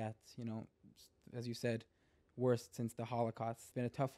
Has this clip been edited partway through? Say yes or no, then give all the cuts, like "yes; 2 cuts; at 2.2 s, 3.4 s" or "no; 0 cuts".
no; 0 cuts